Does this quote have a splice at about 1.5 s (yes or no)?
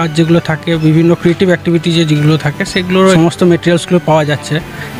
no